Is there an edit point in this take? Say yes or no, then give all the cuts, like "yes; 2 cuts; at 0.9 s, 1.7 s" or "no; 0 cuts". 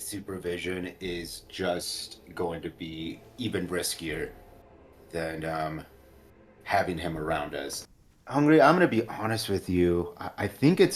yes; 1 cut; at 7.8 s